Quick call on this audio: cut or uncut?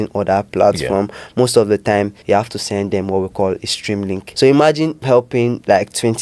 cut